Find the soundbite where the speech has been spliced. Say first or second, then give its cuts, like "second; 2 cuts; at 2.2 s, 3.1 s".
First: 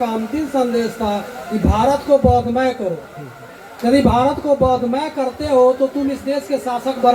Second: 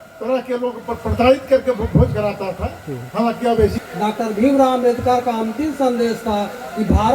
second; 1 cut; at 3.8 s